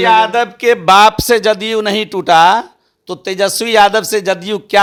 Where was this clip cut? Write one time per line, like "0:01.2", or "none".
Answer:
none